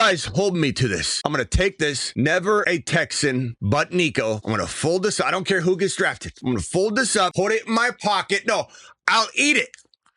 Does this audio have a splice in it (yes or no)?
yes